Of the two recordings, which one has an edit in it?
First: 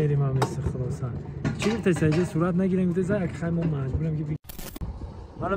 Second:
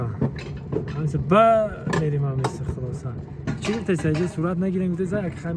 first; 1 cut; at 4.5 s

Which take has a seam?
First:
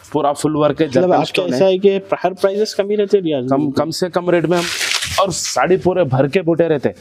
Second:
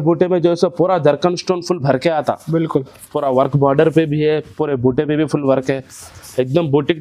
first; 1 cut; at 4.6 s

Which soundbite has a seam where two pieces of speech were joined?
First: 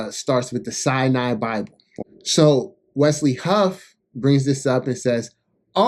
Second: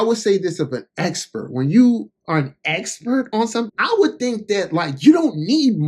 first; 1 cut; at 1.8 s

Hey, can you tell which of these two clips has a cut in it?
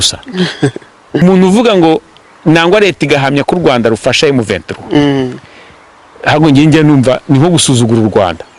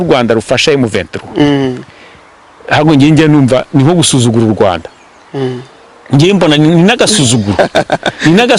first; 1 cut; at 1.2 s

